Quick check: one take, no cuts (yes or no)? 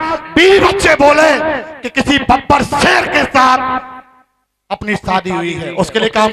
yes